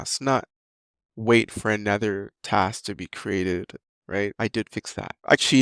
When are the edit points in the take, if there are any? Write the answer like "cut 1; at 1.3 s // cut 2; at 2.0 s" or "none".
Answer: none

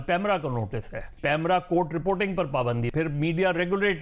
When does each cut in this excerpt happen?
cut 1; at 1.2 s // cut 2; at 2.9 s

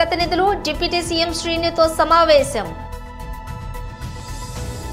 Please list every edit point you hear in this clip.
cut 1; at 2.7 s // cut 2; at 4.2 s

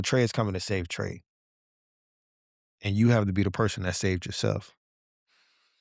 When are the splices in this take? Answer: none

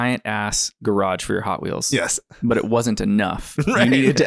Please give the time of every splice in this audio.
none

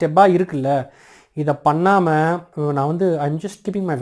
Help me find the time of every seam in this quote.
cut 1; at 2.5 s

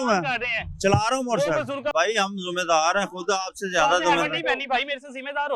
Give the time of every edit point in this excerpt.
cut 1; at 1.9 s

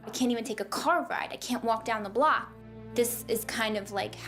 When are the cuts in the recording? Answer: cut 1; at 2.7 s

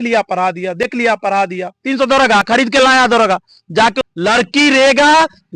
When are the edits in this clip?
cut 1; at 4.0 s

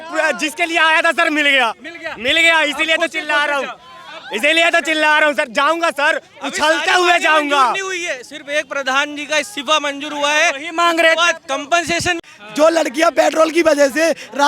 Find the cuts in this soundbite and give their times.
cut 1; at 12.2 s

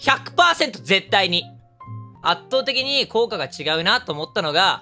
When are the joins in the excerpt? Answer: cut 1; at 2.1 s

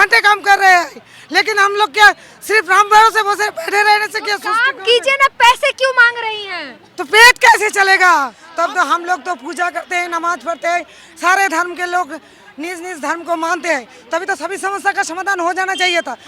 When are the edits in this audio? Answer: cut 1; at 8.4 s

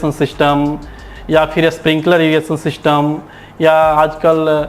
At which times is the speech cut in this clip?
none

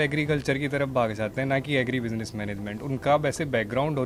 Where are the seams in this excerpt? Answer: none

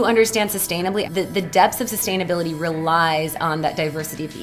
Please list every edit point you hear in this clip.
cut 1; at 1.0 s

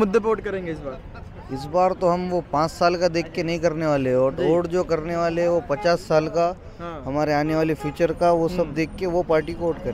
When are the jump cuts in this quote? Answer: none

